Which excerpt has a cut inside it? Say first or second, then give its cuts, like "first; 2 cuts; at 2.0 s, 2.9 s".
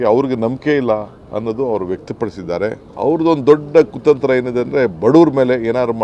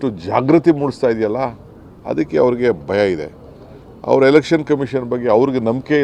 first; 1 cut; at 2.8 s